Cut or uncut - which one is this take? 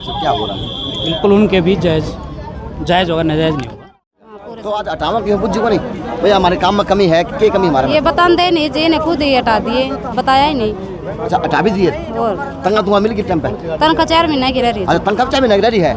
cut